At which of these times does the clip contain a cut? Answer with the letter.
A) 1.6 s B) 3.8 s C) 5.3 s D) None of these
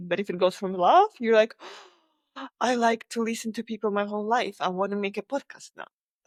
D